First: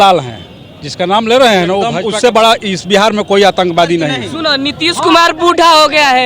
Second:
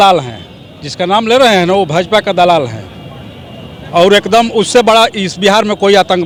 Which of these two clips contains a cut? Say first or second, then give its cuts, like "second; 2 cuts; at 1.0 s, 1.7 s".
first; 2 cuts; at 2.2 s, 4.3 s